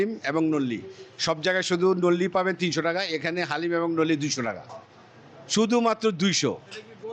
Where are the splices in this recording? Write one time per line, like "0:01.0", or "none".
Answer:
none